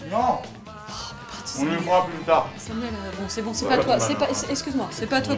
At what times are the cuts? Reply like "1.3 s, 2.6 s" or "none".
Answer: none

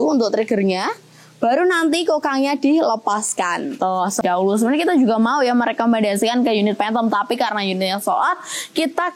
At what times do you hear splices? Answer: 4.2 s

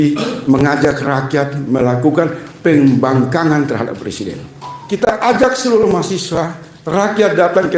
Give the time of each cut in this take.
4.7 s

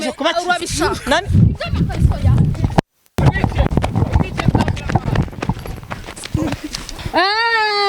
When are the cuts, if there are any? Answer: 6.9 s

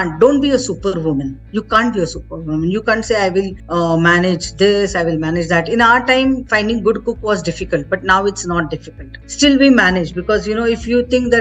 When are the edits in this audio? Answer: 9.2 s

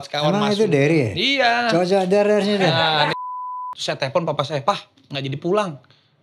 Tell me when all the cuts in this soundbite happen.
3.1 s

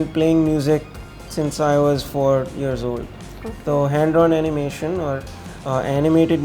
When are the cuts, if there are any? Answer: none

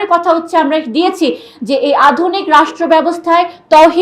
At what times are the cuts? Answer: none

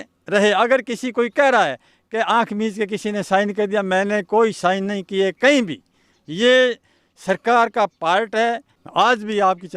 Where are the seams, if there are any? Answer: 8.7 s

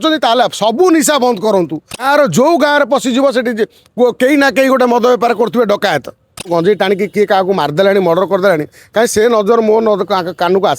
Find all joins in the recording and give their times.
2.0 s, 6.5 s

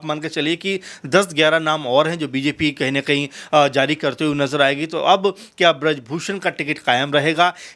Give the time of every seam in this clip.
none

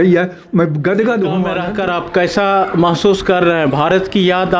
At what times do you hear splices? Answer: 1.6 s

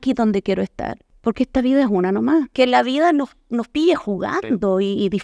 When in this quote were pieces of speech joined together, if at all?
1.1 s, 2.5 s

